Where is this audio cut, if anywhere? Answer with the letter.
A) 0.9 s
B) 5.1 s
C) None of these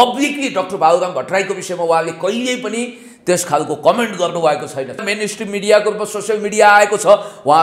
B